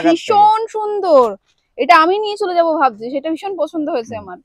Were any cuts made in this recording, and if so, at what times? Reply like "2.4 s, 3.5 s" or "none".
none